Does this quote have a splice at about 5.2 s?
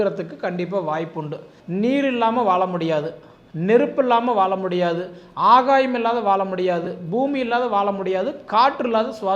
no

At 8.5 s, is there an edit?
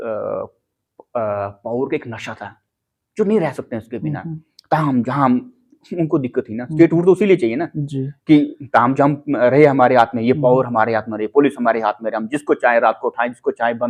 no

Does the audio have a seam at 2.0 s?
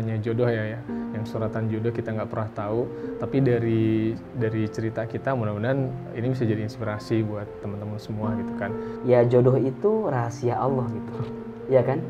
no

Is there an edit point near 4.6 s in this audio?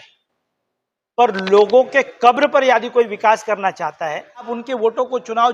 yes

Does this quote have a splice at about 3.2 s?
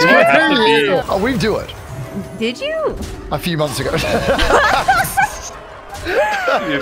no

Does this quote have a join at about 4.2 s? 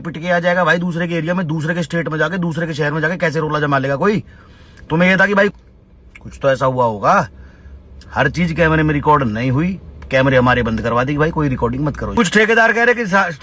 no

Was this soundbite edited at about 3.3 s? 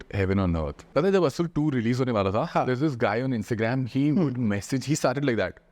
no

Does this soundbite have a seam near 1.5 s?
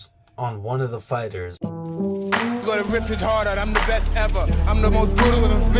yes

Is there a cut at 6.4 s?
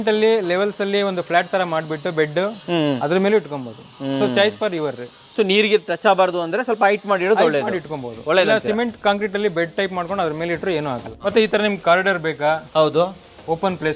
no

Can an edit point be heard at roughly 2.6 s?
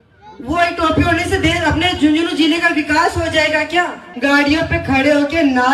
no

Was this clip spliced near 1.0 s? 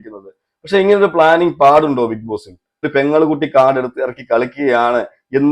no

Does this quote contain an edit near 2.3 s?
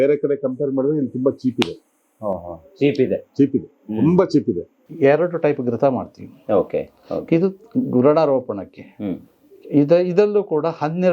no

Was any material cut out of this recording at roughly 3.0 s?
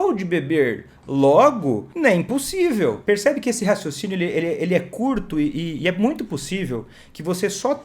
yes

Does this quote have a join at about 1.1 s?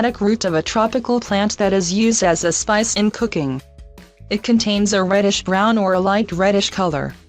yes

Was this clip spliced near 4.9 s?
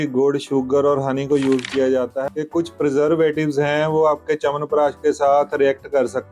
no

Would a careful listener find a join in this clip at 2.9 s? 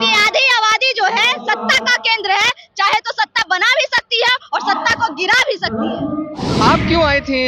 no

